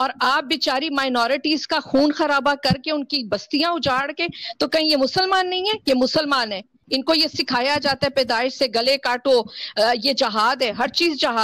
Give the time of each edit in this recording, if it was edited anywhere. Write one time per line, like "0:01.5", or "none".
0:06.7